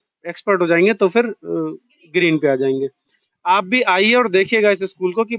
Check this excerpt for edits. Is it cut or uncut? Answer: cut